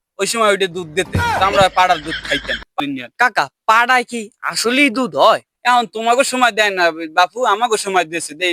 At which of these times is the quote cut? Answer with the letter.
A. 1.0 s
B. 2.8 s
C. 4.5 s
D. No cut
B